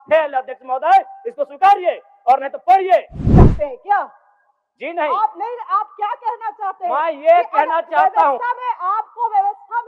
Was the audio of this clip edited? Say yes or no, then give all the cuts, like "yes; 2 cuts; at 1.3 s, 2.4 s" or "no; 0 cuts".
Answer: yes; 1 cut; at 3.2 s